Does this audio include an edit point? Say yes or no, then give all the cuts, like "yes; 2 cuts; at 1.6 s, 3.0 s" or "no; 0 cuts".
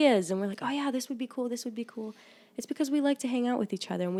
no; 0 cuts